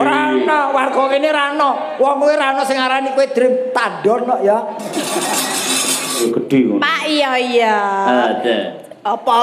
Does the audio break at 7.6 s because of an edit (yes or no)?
no